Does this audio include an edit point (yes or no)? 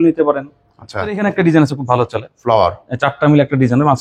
yes